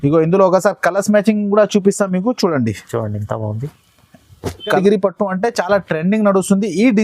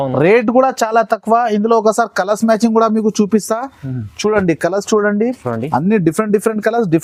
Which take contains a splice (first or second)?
first